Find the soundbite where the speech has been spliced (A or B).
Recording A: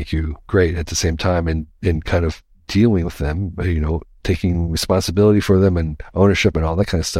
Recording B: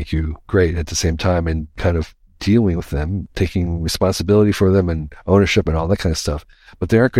B